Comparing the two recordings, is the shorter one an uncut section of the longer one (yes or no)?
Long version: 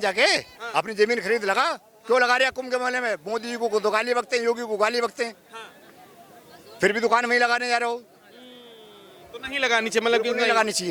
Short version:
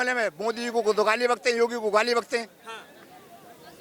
yes